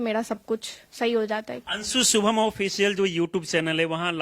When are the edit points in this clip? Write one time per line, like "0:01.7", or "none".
0:01.5